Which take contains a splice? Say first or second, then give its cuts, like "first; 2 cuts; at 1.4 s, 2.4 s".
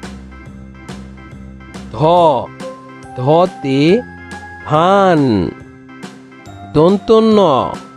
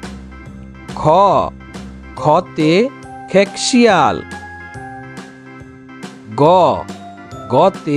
second; 3 cuts; at 1.0 s, 4.8 s, 6.3 s